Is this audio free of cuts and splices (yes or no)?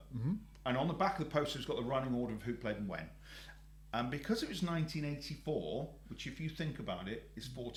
yes